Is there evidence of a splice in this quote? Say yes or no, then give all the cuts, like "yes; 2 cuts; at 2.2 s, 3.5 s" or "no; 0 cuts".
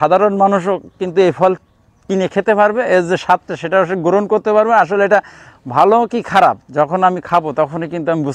no; 0 cuts